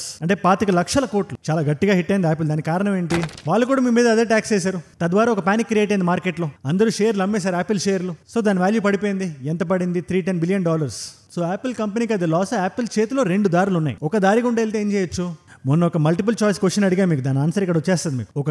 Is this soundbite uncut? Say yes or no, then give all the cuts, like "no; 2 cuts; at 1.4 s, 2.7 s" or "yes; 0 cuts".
no; 1 cut; at 3.3 s